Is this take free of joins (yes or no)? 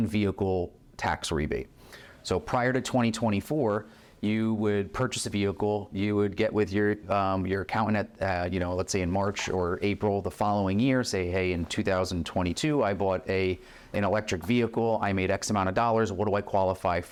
yes